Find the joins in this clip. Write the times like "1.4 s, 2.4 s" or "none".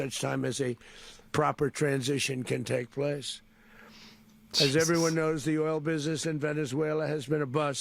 none